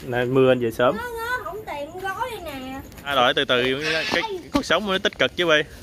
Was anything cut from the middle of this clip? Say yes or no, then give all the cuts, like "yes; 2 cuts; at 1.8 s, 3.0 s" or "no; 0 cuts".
yes; 1 cut; at 3.1 s